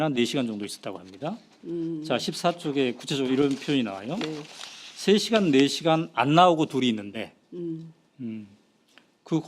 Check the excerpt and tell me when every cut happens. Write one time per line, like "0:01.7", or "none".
0:05.4